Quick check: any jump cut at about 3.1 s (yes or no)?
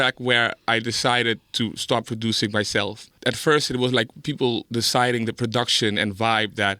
yes